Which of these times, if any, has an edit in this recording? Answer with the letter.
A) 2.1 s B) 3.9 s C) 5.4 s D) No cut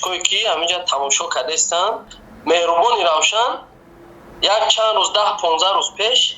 A